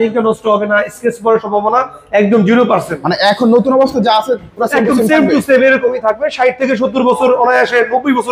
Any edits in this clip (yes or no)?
no